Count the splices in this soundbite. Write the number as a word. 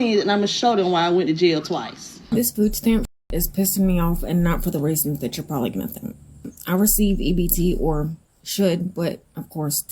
one